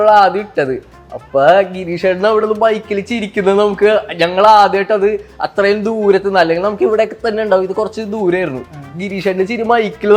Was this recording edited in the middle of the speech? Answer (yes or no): no